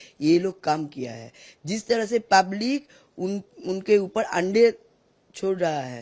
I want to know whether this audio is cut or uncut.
uncut